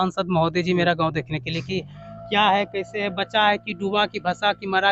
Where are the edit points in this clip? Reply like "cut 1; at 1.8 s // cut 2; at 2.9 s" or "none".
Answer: none